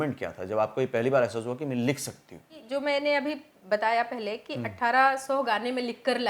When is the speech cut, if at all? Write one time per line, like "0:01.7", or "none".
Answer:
0:02.5